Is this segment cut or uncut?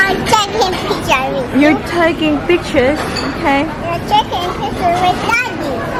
uncut